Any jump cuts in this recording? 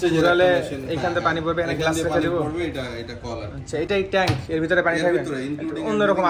no; 0 cuts

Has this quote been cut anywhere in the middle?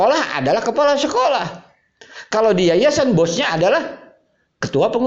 no; 0 cuts

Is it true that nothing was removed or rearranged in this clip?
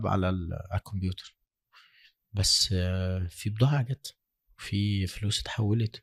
yes; 0 cuts

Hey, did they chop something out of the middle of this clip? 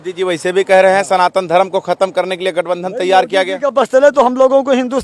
no; 0 cuts

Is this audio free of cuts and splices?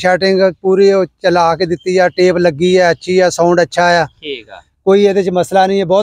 yes; 0 cuts

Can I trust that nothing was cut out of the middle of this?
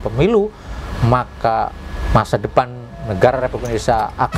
yes; 0 cuts

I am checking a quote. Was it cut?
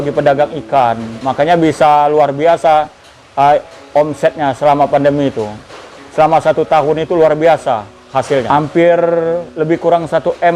yes; 1 cut; at 8.5 s

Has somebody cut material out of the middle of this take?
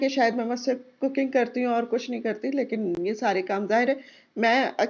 no; 0 cuts

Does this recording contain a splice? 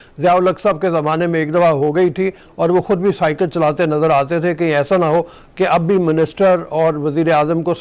no; 0 cuts

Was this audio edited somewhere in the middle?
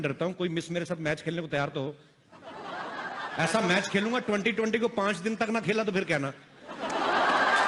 no; 0 cuts

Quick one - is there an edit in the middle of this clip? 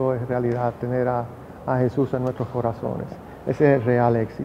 no; 0 cuts

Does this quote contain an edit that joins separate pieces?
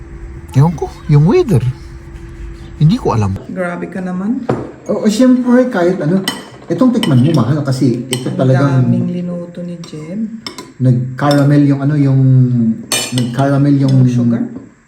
yes; 1 cut; at 3.4 s

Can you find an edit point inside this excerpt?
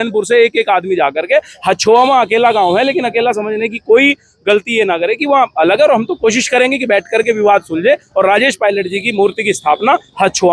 no; 0 cuts

